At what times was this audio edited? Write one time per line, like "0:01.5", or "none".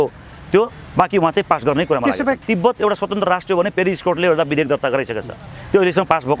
0:02.4